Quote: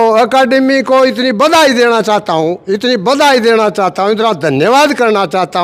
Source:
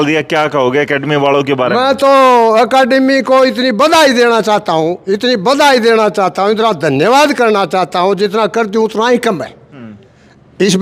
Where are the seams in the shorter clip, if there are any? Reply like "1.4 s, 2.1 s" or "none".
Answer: none